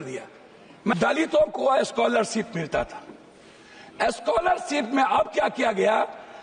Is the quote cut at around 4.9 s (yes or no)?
no